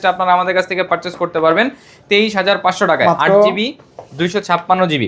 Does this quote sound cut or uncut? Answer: uncut